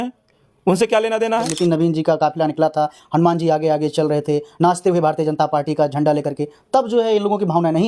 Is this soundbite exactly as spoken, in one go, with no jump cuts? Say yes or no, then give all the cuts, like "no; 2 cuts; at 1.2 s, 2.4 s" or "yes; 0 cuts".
no; 1 cut; at 1.5 s